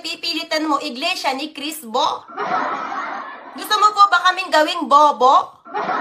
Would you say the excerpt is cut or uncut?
cut